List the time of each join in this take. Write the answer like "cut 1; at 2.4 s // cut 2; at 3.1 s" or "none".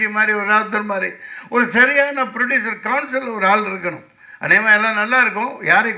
none